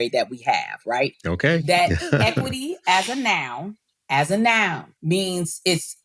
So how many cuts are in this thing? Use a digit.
2